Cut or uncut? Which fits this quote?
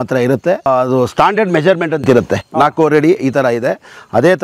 uncut